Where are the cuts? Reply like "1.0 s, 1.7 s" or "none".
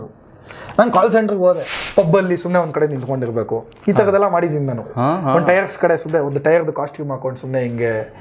1.8 s